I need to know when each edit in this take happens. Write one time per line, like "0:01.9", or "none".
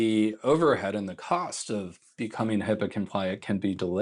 none